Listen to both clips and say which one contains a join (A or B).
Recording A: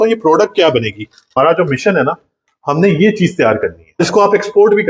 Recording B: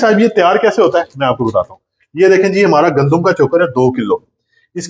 A